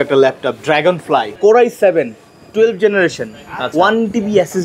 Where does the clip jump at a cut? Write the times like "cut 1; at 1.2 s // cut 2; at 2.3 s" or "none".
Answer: cut 1; at 1.3 s